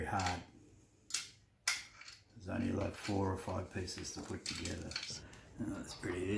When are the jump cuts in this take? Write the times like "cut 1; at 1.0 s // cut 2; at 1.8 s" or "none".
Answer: cut 1; at 5.1 s